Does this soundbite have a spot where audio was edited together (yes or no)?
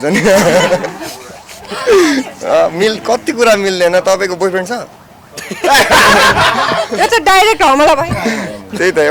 no